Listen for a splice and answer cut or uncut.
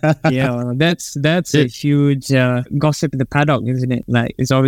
uncut